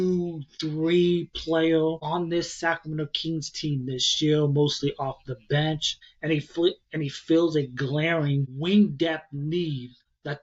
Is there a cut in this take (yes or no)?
no